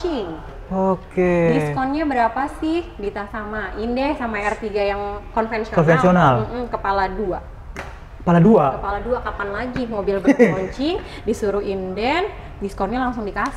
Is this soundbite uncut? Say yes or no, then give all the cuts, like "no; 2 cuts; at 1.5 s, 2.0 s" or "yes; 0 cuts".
yes; 0 cuts